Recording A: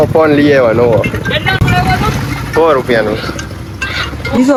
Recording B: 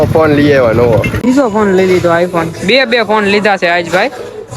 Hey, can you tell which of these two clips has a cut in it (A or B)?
B